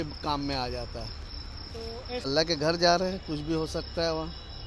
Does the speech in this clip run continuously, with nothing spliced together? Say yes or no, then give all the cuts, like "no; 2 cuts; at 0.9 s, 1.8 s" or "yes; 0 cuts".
no; 1 cut; at 2.3 s